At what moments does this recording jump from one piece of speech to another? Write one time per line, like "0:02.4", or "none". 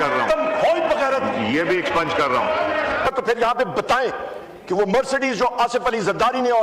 0:03.1